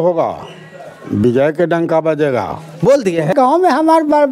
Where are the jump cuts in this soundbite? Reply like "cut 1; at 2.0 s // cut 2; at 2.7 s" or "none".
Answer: cut 1; at 3.3 s